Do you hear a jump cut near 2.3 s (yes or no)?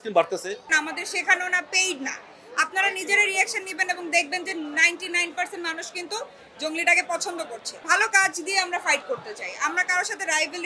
no